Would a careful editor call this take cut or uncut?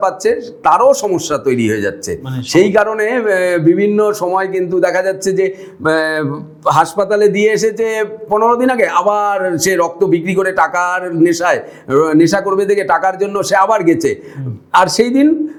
uncut